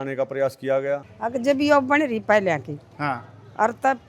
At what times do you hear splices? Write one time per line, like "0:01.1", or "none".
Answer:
0:01.1